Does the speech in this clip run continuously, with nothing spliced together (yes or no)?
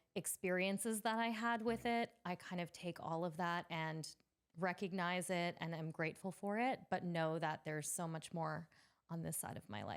yes